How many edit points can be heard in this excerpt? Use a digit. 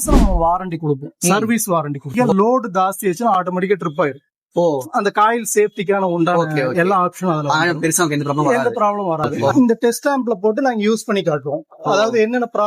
2